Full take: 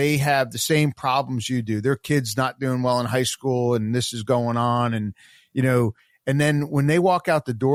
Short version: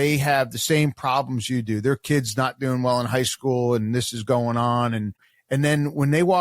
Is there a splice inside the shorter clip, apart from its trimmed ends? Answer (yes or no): yes